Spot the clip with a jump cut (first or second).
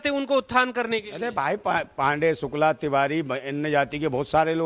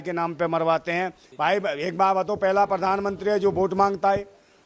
second